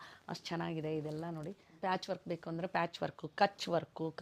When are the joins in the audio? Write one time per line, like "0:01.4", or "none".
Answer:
0:01.7